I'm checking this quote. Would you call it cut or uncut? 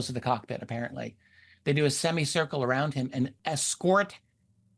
cut